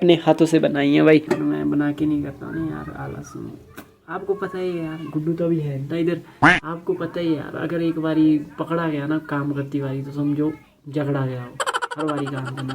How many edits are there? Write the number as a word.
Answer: one